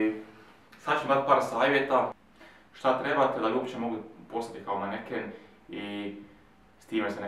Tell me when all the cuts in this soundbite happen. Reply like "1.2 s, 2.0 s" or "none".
2.2 s

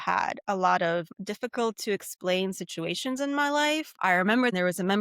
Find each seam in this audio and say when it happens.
4.1 s

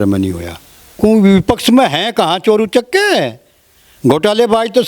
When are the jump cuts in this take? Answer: 1.0 s

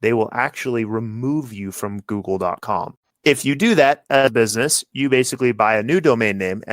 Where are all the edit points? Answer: 3.1 s

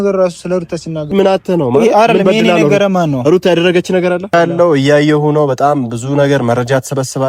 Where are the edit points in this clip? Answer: 1.1 s, 4.3 s

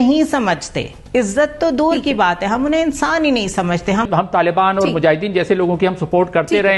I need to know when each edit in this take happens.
4.1 s

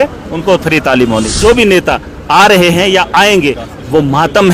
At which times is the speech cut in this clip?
1.4 s

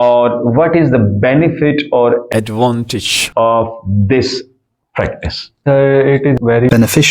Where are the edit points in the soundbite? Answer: none

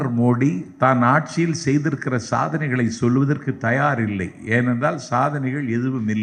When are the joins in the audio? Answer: none

